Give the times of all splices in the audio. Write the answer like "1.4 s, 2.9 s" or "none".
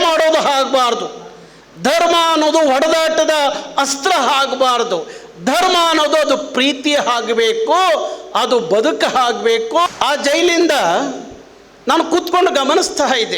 9.9 s